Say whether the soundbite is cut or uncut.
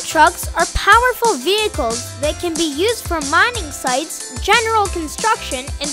uncut